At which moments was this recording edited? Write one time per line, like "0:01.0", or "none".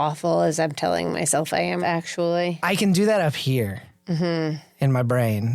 0:01.8
0:02.6